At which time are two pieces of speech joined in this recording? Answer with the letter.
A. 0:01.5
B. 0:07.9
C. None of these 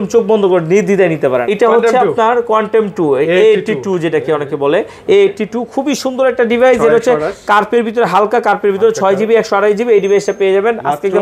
A